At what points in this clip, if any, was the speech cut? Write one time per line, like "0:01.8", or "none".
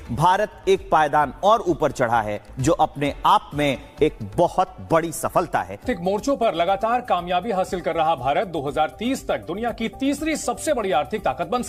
none